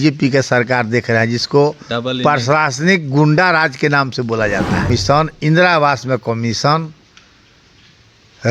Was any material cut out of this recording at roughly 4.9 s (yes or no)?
yes